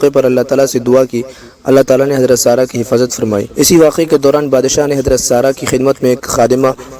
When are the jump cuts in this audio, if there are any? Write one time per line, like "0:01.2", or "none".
0:03.5